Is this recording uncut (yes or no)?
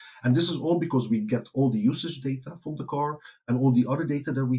yes